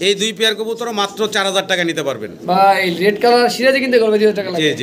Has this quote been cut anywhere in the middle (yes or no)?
no